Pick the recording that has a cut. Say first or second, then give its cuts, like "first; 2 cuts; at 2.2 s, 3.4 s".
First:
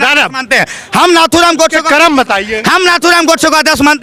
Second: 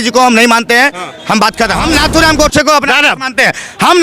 second; 1 cut; at 1.8 s